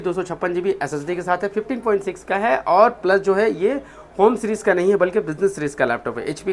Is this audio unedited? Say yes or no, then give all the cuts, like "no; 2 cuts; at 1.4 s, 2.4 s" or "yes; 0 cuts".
yes; 0 cuts